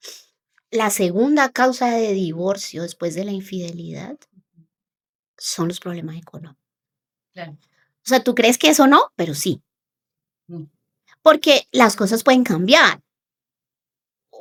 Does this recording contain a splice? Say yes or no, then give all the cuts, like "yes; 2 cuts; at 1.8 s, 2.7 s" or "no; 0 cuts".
no; 0 cuts